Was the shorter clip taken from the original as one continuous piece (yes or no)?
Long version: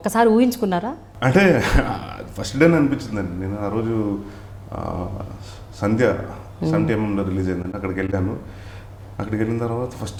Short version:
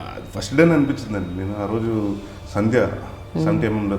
no